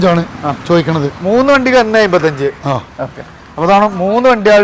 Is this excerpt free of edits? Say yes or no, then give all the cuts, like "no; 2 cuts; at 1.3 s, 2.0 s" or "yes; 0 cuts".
yes; 0 cuts